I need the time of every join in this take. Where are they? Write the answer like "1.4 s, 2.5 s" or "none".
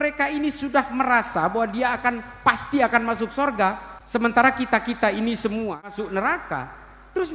3.9 s, 6.0 s